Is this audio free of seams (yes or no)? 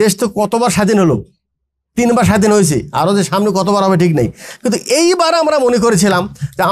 yes